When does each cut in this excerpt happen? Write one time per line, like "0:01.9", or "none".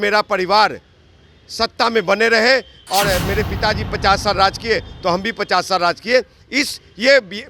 0:02.8